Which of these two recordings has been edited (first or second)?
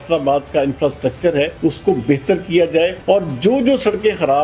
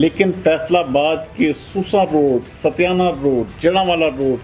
first